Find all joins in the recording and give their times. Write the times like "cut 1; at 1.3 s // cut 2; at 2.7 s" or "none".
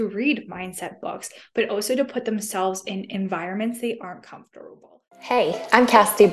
cut 1; at 4.9 s